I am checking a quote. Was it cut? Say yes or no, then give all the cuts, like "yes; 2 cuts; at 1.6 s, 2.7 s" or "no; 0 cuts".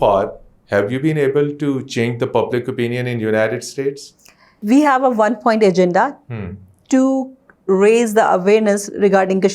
yes; 1 cut; at 4.6 s